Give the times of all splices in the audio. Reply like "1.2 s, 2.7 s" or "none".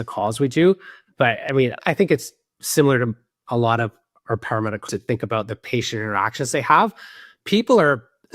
1.8 s, 4.9 s